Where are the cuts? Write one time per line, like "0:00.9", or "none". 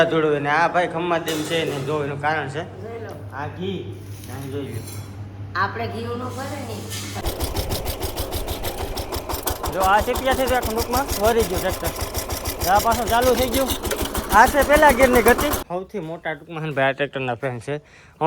0:07.2
0:15.6